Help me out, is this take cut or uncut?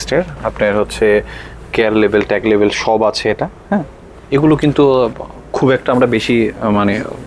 uncut